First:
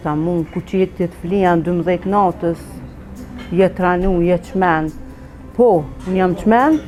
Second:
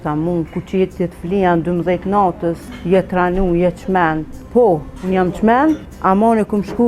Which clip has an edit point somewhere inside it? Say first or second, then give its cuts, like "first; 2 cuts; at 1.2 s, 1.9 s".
second; 3 cuts; at 2.7 s, 4.3 s, 5.9 s